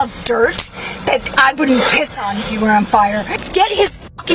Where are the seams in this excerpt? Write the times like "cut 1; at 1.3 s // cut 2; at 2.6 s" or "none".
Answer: cut 1; at 3.3 s